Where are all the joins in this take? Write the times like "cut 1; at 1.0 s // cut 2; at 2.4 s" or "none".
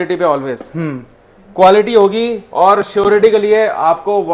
none